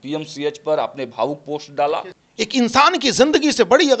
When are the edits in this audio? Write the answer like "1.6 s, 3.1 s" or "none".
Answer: 2.2 s